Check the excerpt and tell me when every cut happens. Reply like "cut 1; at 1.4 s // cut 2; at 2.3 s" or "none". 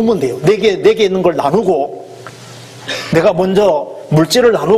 none